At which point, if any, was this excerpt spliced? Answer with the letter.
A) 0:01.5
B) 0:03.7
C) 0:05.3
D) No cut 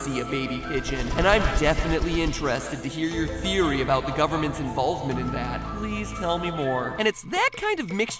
B